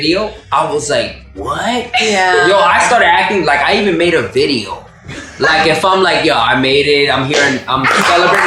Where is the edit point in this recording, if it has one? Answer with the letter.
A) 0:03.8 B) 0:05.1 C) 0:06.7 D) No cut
D